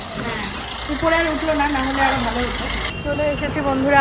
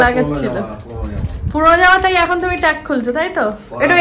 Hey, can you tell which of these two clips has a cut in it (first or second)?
first